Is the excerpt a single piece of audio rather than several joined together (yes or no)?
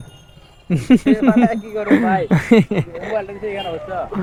yes